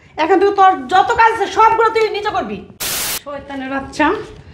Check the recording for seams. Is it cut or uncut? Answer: cut